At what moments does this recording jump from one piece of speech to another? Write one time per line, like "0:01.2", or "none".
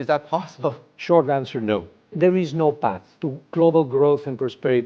0:00.9
0:03.1